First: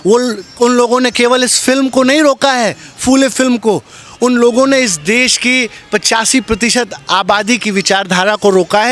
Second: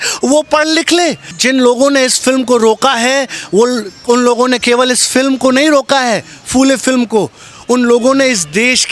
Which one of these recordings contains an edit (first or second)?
second